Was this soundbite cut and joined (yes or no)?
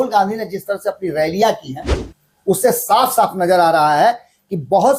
no